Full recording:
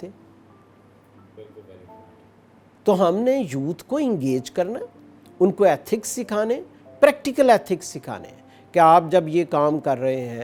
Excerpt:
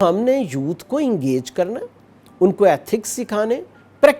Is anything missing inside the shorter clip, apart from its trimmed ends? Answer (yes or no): no